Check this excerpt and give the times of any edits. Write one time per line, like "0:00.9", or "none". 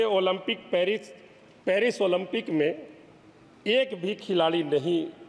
none